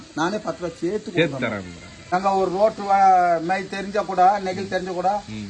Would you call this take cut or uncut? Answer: cut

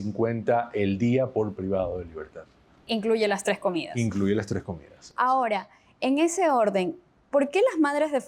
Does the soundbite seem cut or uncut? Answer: uncut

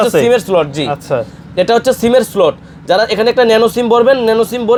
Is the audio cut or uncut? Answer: uncut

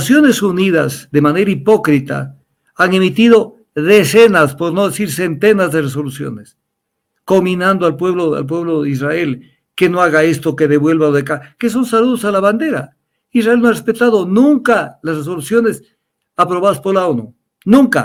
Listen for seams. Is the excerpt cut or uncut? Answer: uncut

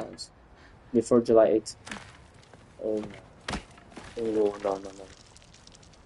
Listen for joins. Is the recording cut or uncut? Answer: uncut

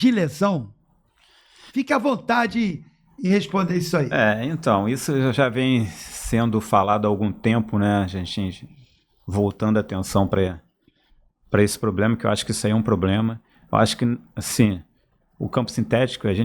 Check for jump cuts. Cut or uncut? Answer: uncut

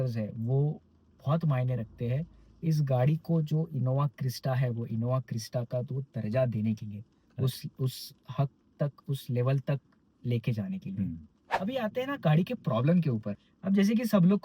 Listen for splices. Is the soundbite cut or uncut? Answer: cut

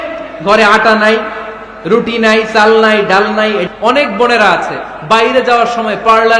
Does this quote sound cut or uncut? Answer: cut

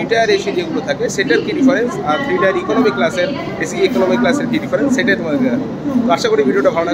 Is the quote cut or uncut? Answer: uncut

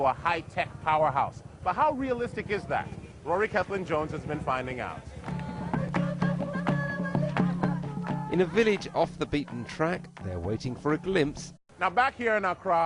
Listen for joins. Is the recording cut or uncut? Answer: uncut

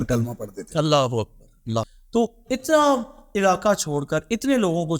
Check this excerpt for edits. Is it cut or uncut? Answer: cut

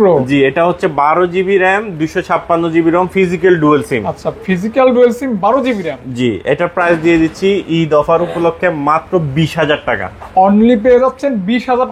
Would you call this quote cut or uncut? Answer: uncut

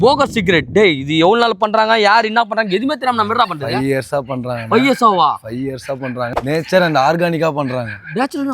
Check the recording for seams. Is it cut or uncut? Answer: cut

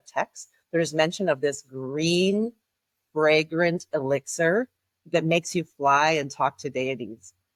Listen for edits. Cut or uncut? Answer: uncut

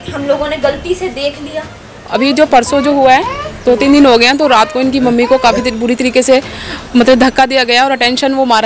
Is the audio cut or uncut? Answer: cut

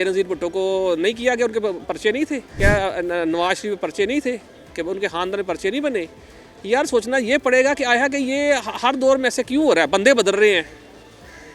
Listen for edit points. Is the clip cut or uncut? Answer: cut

